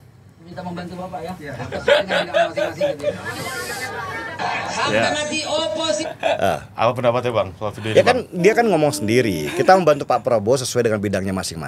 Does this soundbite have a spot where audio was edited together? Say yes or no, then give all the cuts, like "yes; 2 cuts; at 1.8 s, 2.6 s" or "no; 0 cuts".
no; 0 cuts